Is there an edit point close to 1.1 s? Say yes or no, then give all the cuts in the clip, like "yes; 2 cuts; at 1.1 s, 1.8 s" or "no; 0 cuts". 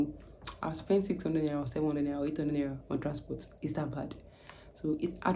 no; 0 cuts